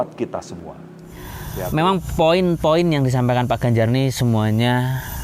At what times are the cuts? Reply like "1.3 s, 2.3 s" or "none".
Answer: 1.5 s